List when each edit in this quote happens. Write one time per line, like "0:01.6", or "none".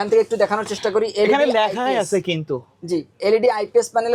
none